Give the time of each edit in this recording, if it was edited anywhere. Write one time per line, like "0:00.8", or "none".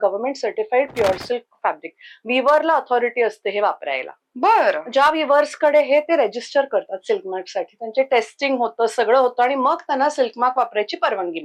none